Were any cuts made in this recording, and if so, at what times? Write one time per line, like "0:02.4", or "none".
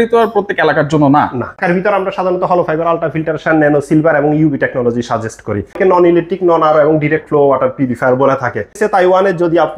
0:01.6
0:05.8
0:08.7